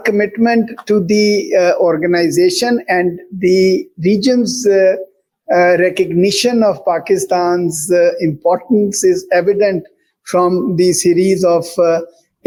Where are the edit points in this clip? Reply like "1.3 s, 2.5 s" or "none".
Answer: none

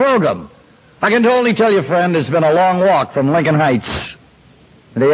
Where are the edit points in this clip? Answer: none

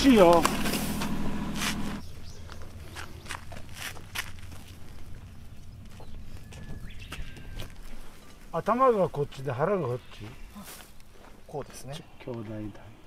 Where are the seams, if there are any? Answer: 7.7 s, 12.0 s

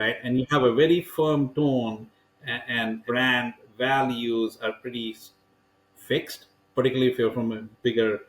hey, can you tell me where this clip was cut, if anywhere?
3.0 s

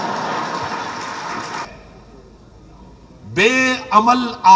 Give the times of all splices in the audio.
1.7 s

